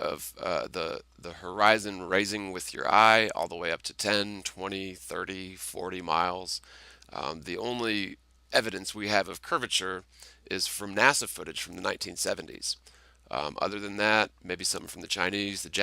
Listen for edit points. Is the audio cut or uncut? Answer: cut